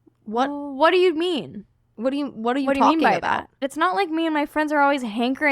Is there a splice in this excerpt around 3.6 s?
yes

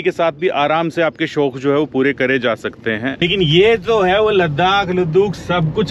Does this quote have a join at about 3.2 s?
yes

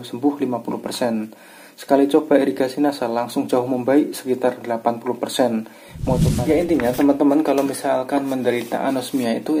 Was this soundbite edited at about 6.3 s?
yes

